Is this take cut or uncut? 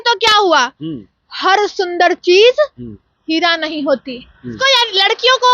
cut